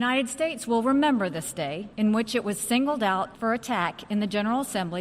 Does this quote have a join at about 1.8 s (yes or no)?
yes